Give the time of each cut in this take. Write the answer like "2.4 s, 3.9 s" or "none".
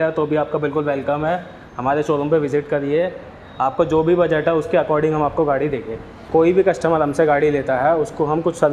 6.1 s